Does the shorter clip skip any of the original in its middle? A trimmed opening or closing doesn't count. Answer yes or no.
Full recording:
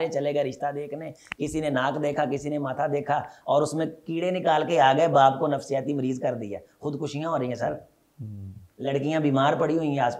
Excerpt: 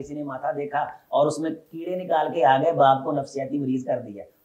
no